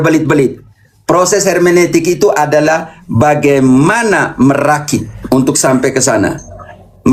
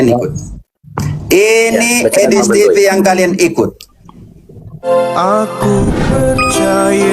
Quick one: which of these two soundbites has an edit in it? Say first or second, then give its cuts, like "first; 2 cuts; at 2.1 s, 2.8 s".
second; 1 cut; at 4.7 s